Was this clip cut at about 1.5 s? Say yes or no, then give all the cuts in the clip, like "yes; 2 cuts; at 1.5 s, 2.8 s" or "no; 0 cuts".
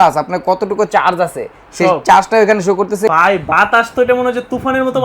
no; 1 cut; at 3.1 s